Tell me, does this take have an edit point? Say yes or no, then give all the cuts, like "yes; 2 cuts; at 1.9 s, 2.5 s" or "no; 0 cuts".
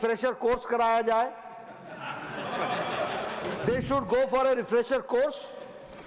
yes; 1 cut; at 3.5 s